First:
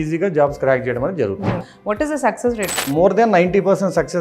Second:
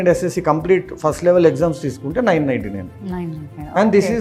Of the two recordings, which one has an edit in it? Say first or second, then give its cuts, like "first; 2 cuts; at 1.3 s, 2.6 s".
first; 2 cuts; at 1.7 s, 2.9 s